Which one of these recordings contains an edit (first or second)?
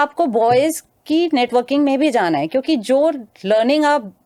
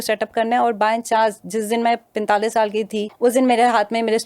second